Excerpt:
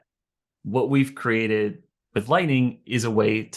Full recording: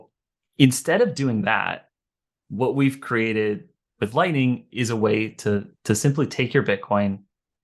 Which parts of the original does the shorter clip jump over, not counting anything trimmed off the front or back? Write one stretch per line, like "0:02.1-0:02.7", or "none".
none

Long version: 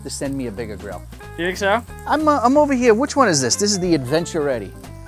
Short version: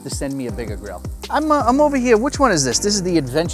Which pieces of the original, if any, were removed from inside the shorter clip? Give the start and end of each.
0:01.2-0:01.9

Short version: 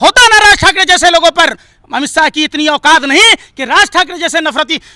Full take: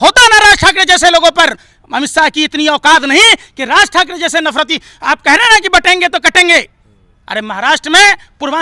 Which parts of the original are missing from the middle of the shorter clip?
none

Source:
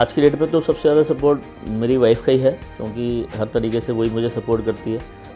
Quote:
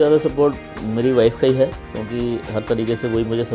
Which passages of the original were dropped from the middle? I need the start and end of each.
none

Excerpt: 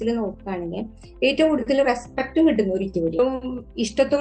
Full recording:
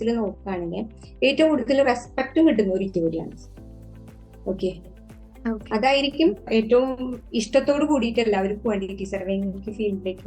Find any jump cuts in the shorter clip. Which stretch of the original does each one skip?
0:03.2-0:06.8

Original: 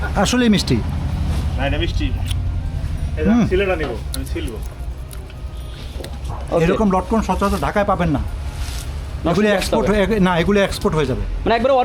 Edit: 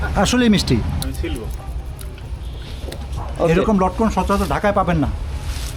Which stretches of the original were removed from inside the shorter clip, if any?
0:01.0-0:04.1

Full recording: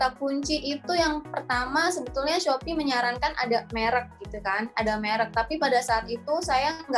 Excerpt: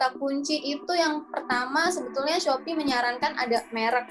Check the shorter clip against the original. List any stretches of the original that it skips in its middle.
none

